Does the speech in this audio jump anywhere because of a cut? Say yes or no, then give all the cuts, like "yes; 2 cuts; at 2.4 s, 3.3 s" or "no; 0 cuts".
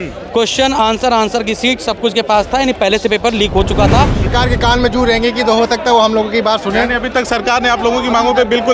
yes; 1 cut; at 4.3 s